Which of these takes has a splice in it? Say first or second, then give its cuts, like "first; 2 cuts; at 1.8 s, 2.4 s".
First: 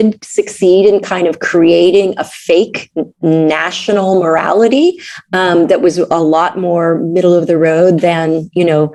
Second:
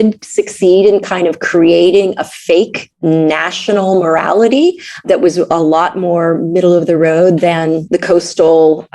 second; 3 cuts; at 2.8 s, 5.1 s, 7.8 s